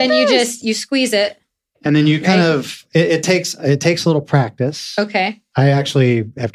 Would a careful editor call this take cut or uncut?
uncut